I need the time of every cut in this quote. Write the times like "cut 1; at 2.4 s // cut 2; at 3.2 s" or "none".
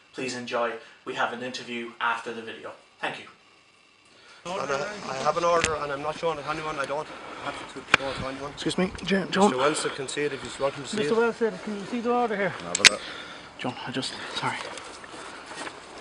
cut 1; at 12.2 s

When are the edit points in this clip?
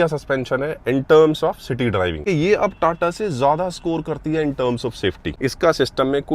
cut 1; at 2.2 s // cut 2; at 5.4 s

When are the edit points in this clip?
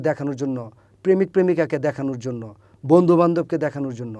none

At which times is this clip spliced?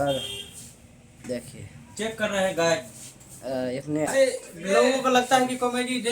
cut 1; at 4.1 s

